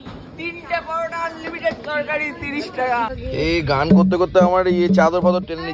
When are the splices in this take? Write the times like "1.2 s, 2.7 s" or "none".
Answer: 3.2 s